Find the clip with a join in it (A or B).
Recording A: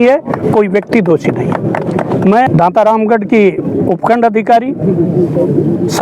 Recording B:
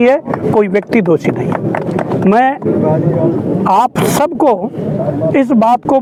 A